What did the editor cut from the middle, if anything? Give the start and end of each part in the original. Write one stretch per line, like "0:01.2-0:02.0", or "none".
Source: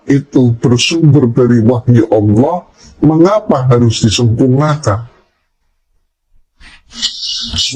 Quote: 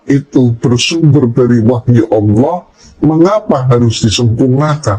none